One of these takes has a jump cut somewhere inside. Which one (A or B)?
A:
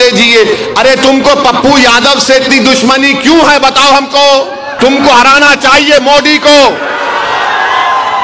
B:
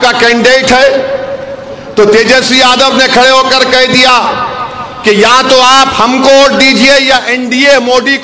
A